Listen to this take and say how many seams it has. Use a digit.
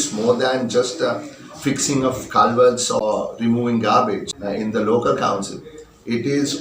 2